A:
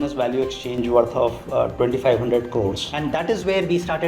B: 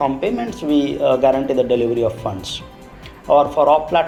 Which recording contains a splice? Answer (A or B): A